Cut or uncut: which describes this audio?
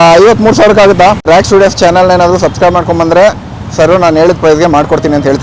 cut